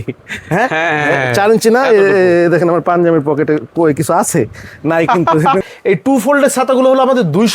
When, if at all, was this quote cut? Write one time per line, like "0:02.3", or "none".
0:05.6